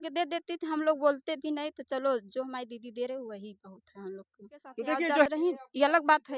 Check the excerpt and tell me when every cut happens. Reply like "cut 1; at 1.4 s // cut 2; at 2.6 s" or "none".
cut 1; at 5.3 s